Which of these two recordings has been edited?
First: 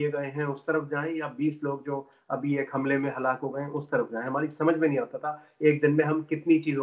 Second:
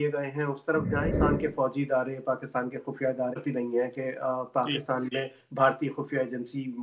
second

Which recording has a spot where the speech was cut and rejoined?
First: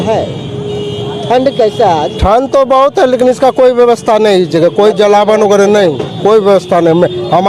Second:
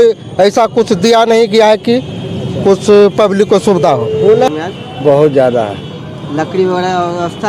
second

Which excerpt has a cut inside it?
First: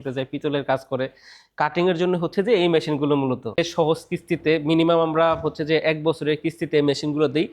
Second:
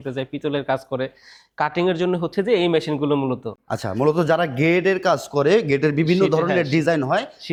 first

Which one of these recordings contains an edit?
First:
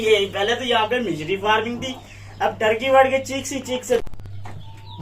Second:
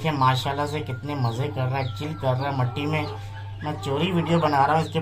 first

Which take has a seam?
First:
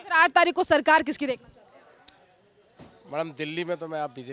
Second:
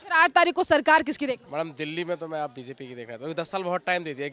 second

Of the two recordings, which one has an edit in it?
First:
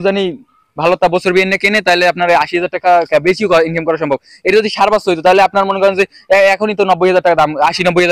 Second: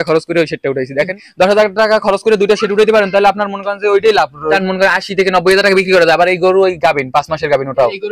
second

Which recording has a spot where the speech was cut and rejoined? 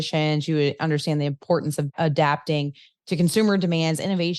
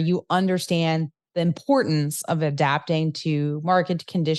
first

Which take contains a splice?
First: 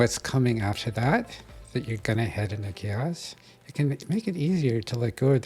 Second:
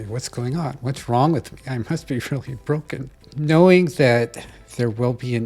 second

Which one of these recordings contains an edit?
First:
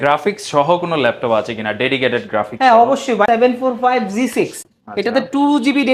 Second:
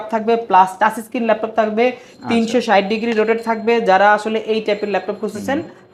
first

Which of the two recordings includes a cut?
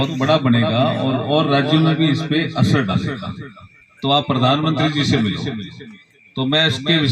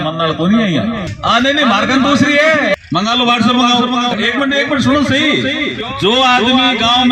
second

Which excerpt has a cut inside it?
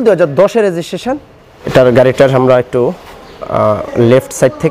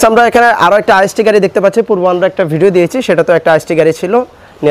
first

